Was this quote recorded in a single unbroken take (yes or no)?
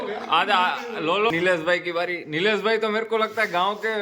no